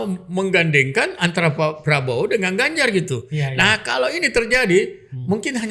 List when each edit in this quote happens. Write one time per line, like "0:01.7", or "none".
none

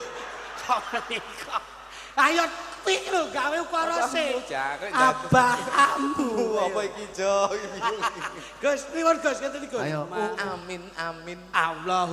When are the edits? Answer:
0:10.3

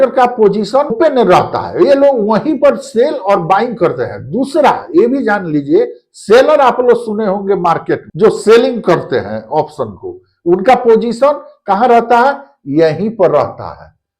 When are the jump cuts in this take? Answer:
0:00.9
0:08.1

